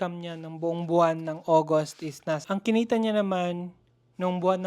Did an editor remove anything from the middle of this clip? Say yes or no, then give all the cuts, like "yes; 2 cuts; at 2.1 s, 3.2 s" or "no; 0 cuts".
yes; 1 cut; at 2.4 s